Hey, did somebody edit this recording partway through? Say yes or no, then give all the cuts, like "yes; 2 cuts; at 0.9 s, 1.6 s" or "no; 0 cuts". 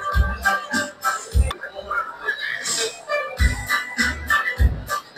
no; 0 cuts